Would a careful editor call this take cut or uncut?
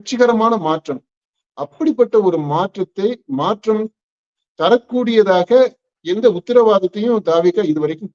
uncut